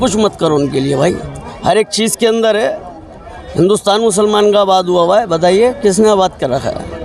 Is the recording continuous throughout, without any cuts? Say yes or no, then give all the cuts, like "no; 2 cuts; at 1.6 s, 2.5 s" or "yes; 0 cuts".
no; 1 cut; at 1.3 s